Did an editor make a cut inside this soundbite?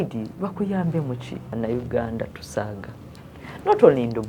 yes; 1 cut; at 1.5 s

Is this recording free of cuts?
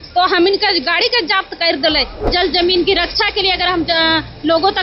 no; 1 cut; at 2.3 s

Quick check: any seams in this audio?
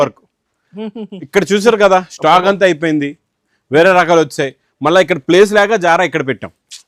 no; 0 cuts

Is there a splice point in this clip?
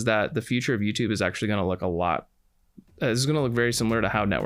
no; 0 cuts

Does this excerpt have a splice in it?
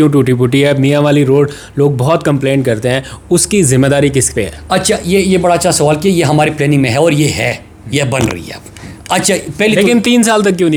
no; 0 cuts

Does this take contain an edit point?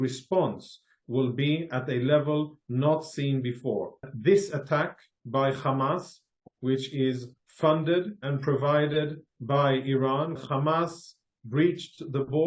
yes; 2 cuts; at 4.1 s, 10.4 s

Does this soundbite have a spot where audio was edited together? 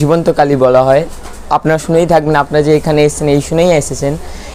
no; 0 cuts

